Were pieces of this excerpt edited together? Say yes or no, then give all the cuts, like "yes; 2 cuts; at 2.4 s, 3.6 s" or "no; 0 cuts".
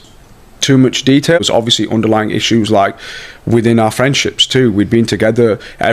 yes; 1 cut; at 1.4 s